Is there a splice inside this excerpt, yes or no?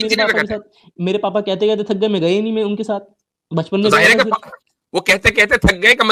no